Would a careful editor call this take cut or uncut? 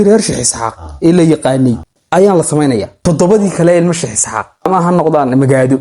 cut